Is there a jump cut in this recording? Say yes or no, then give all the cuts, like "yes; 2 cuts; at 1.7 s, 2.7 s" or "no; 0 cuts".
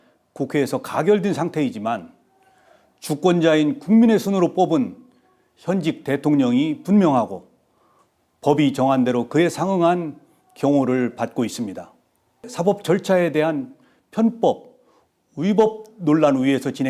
yes; 1 cut; at 12.5 s